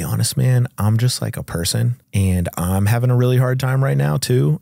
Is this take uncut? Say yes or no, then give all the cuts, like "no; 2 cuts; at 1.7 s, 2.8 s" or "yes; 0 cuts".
no; 1 cut; at 2.0 s